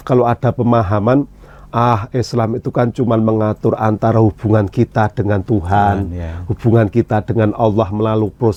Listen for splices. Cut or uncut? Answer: uncut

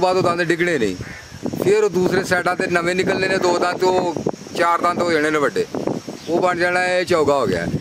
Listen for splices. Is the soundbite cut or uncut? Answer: uncut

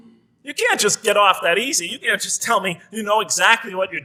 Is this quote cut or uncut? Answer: uncut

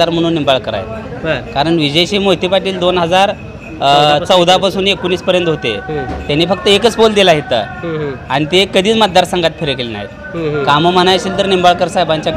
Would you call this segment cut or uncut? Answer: uncut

